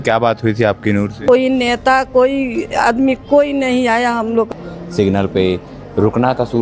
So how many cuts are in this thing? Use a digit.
2